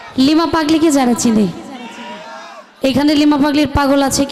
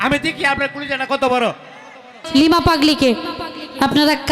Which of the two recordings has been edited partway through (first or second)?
second